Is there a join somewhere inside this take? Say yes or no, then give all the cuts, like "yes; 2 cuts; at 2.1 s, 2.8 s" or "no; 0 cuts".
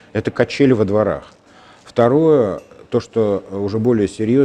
no; 0 cuts